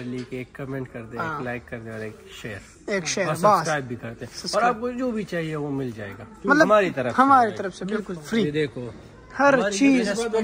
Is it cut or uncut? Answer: uncut